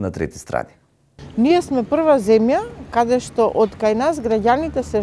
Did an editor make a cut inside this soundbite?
yes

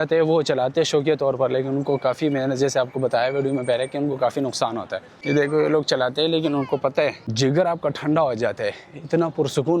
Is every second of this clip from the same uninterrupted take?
no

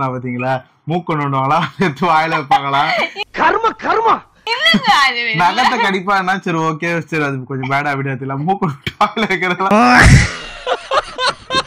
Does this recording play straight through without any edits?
no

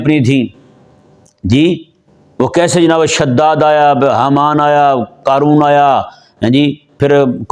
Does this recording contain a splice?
no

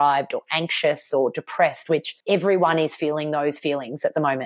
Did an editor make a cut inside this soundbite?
yes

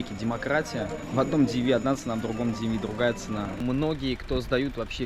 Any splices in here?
yes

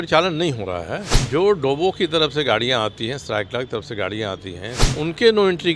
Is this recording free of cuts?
no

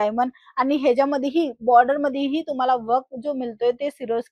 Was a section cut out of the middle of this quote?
no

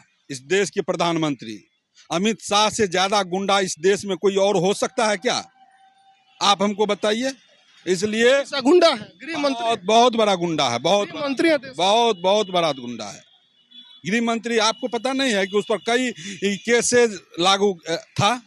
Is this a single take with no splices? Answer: yes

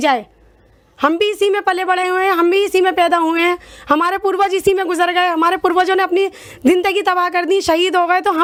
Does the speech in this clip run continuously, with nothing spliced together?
yes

